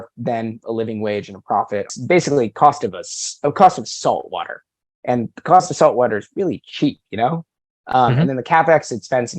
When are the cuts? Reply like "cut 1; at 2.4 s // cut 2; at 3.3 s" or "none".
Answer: cut 1; at 1.9 s